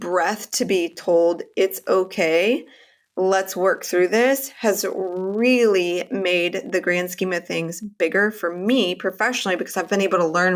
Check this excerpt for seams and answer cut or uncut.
uncut